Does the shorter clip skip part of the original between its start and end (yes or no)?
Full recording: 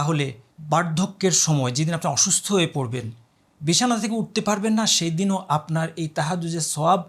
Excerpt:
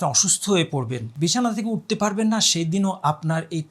yes